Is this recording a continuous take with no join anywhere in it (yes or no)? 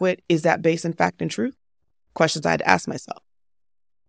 yes